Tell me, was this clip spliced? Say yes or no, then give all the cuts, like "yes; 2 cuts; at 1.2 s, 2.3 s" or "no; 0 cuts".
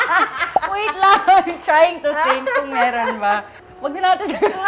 no; 0 cuts